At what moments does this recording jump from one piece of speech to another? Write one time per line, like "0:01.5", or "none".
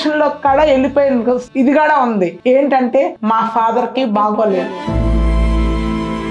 0:01.5
0:02.4
0:03.2